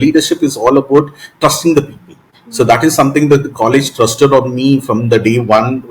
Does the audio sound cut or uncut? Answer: uncut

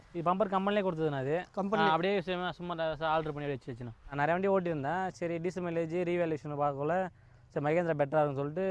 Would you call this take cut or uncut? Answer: cut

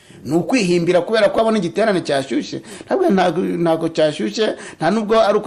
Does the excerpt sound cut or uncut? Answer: uncut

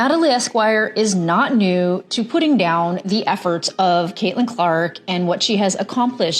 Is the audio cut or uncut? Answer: uncut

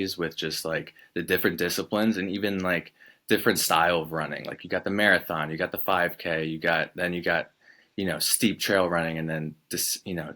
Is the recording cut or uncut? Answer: uncut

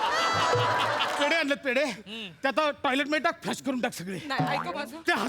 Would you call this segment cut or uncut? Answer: cut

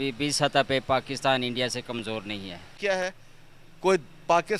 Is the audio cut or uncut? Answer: cut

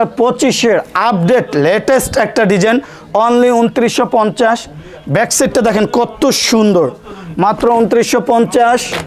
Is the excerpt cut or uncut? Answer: uncut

